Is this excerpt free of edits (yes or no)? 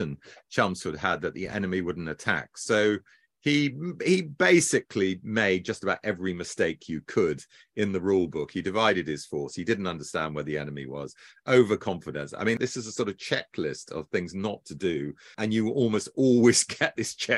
no